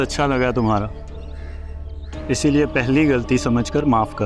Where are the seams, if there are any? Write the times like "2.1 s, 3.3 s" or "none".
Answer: none